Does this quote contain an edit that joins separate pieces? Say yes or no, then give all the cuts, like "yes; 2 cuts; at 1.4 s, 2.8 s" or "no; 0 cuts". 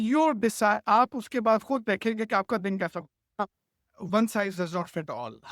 yes; 1 cut; at 3.4 s